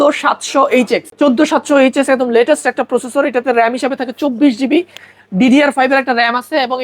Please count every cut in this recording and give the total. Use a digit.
1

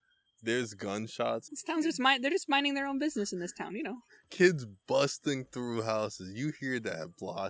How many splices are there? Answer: 1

